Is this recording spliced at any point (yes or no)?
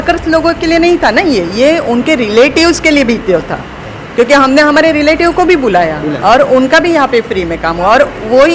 no